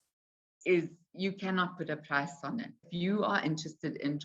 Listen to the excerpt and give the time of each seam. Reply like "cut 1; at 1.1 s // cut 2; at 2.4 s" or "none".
cut 1; at 2.9 s